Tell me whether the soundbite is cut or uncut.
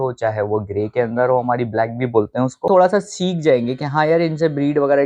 cut